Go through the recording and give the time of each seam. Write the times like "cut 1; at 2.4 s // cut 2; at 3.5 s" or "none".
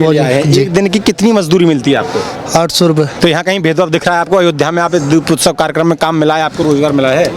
cut 1; at 3.1 s